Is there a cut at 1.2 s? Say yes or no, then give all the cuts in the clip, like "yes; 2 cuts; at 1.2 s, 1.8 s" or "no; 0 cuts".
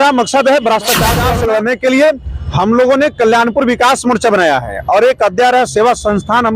yes; 1 cut; at 1.2 s